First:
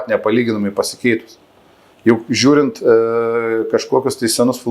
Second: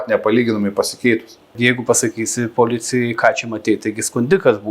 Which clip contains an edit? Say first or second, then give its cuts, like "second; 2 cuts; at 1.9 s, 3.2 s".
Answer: second; 1 cut; at 1.6 s